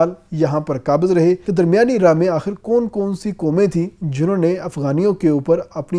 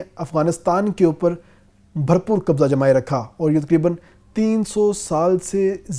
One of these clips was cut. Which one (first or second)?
first